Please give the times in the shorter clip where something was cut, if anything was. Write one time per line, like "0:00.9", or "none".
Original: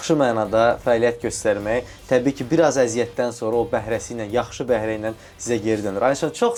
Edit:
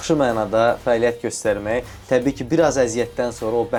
none